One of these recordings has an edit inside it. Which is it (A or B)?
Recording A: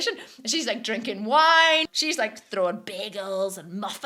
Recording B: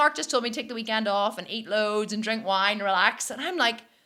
A